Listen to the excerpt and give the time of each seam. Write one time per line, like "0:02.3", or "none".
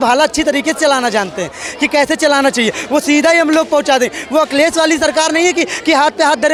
none